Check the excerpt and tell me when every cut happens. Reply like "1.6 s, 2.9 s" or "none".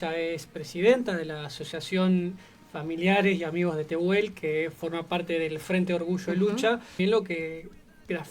7.0 s

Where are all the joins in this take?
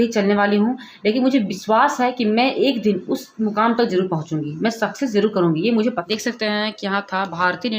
6.0 s

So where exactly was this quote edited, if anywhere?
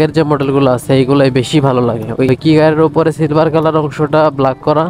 2.3 s

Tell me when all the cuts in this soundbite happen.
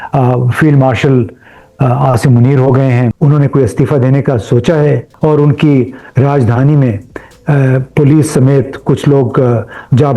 3.1 s, 5.1 s

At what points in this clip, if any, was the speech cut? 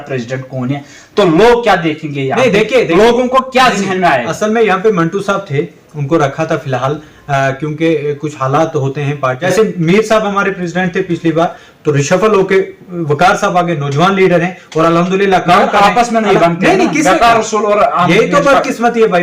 9.4 s

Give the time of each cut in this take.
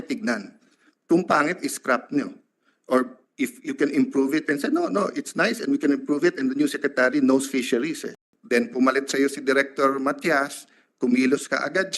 8.3 s

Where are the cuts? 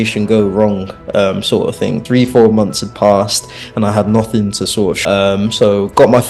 2.0 s, 5.0 s

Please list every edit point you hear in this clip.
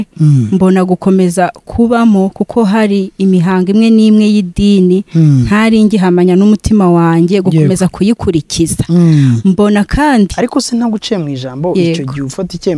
10.3 s

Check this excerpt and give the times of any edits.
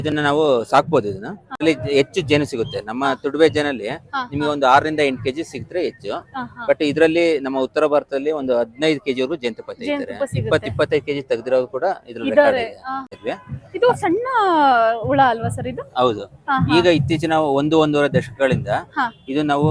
1.6 s, 13.2 s

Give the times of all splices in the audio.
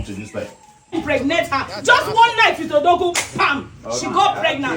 0.9 s

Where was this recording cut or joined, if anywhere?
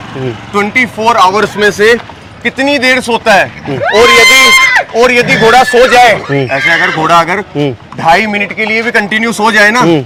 none

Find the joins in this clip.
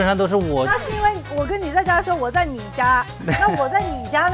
3.2 s

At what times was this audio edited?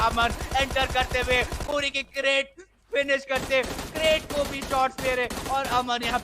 none

